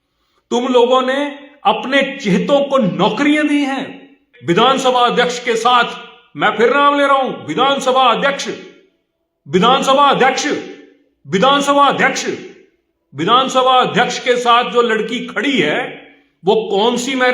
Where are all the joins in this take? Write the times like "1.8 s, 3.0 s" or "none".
4.2 s

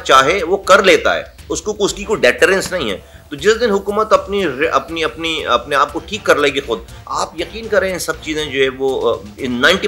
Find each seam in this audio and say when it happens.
none

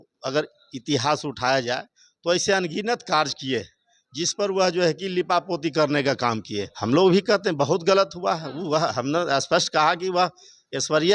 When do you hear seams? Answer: 6.7 s

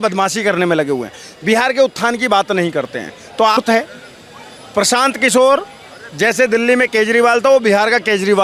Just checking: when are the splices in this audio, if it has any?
3.6 s

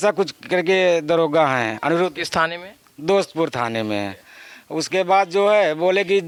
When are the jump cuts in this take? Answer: none

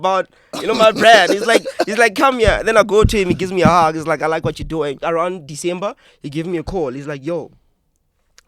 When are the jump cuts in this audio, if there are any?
5.0 s

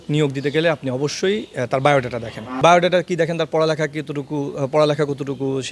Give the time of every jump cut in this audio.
2.4 s

